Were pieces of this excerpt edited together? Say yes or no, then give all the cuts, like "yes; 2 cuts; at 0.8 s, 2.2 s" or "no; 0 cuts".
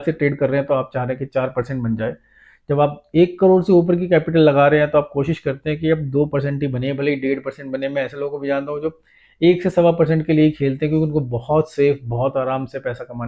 no; 0 cuts